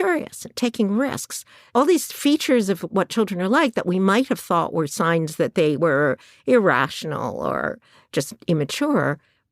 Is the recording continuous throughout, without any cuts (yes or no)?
no